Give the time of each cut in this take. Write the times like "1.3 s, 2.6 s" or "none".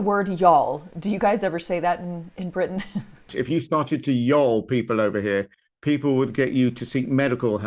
3.4 s